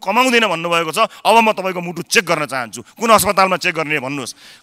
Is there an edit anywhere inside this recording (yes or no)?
no